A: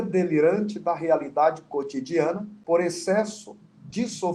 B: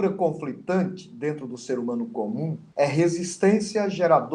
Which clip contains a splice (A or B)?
A